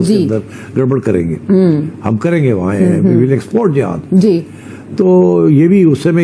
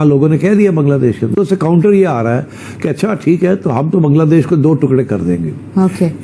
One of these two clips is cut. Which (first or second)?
second